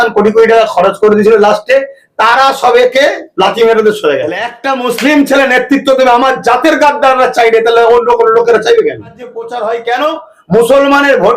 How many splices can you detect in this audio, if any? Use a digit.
2